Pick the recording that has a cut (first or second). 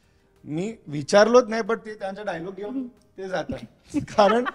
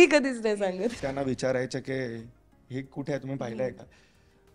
second